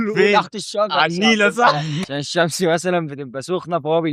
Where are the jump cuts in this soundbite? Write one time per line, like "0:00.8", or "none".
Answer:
0:02.0